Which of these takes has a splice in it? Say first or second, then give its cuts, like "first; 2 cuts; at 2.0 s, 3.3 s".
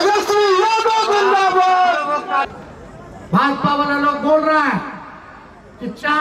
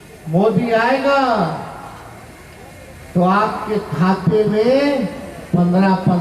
first; 1 cut; at 2.4 s